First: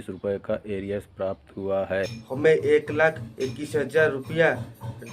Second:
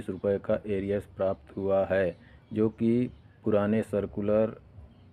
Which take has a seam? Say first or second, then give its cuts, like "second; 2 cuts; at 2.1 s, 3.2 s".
first; 1 cut; at 2.2 s